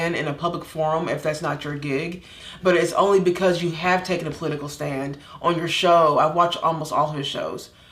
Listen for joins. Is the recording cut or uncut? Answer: cut